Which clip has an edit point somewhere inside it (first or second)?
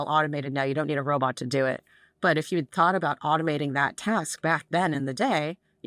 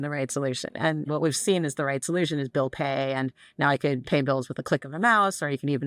second